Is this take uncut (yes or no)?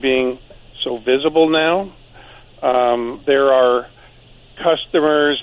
yes